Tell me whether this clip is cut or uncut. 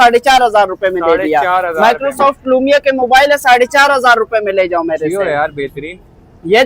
uncut